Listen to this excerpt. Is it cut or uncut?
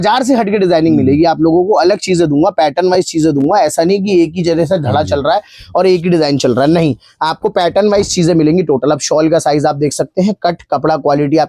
uncut